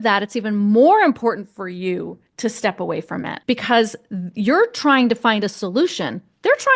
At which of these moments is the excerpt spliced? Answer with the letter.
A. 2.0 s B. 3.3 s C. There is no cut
B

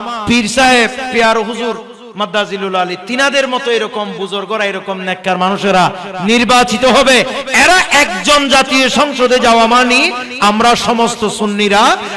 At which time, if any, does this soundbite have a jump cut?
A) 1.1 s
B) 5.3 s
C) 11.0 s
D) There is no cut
A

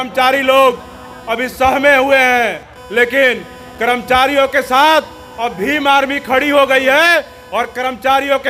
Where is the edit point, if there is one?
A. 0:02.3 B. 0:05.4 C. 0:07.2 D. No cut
D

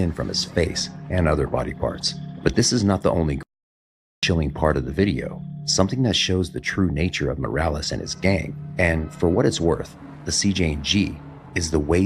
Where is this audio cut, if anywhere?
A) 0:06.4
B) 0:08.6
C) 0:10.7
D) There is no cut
D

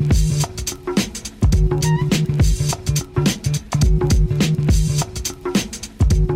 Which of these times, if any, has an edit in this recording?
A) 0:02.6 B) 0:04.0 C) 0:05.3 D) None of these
B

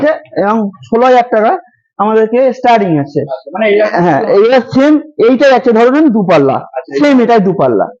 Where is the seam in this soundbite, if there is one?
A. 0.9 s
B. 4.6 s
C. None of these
C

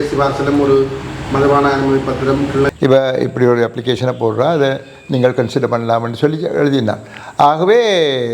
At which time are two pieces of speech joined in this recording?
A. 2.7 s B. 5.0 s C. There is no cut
A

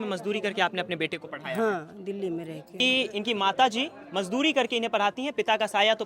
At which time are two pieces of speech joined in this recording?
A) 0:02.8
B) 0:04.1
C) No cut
A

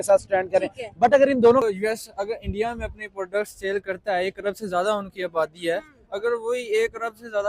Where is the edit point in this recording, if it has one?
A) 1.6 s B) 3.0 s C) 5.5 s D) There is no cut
A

